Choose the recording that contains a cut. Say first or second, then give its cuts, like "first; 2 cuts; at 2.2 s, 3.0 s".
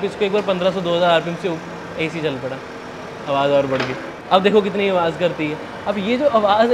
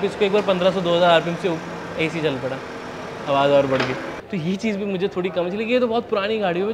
second; 1 cut; at 4.1 s